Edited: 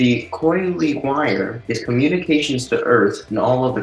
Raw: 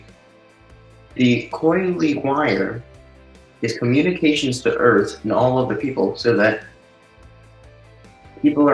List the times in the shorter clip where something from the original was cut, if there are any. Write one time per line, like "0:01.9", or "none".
0:01.6